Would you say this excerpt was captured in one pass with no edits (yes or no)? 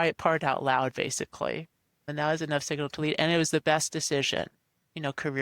yes